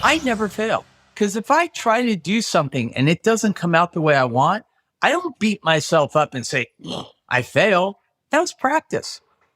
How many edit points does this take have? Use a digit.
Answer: 1